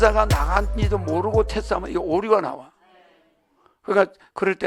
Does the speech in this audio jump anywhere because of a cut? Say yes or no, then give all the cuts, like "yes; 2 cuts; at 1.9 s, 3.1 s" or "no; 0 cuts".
no; 0 cuts